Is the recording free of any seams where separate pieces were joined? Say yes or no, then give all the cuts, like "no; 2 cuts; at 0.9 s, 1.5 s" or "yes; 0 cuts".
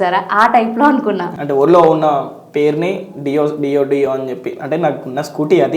no; 1 cut; at 1.3 s